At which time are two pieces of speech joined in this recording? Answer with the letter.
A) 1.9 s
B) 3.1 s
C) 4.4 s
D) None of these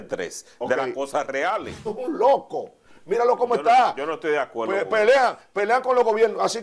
A